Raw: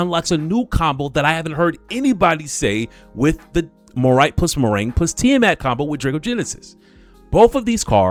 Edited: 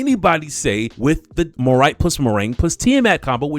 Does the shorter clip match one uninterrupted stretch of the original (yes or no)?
no